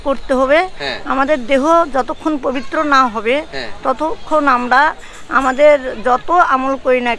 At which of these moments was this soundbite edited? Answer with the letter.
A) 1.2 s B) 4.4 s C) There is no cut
C